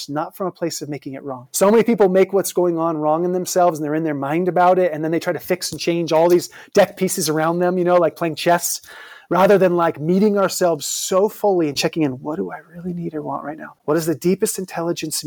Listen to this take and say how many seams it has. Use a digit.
2